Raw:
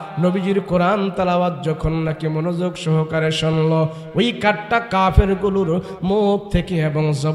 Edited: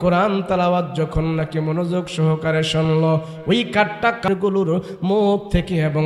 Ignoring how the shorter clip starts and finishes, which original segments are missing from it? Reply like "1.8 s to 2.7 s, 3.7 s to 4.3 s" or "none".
5.0 s to 5.3 s

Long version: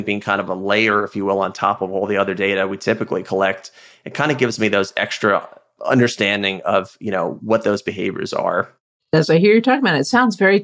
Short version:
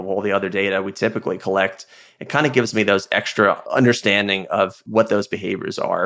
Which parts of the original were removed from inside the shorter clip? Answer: 5.5 s to 5.8 s, 7.0 s to 7.4 s

